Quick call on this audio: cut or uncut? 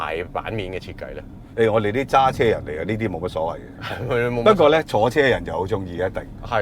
uncut